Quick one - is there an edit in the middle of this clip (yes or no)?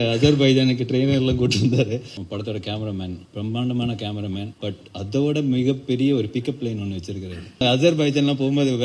yes